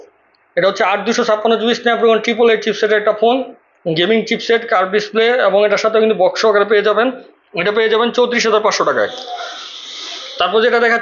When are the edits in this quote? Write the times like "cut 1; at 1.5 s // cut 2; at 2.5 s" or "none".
none